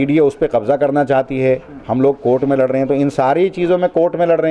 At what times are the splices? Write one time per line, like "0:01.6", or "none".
none